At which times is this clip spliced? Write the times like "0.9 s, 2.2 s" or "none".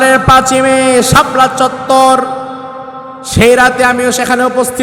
none